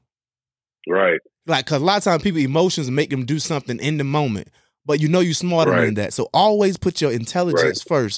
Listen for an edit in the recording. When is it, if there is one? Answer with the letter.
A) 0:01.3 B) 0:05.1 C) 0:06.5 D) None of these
A